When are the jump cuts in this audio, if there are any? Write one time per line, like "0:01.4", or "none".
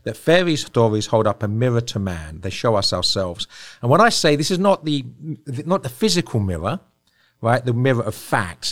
none